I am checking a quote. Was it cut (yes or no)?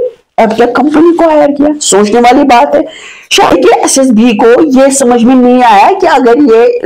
yes